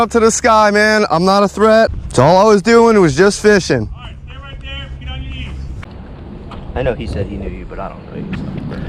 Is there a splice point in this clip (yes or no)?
yes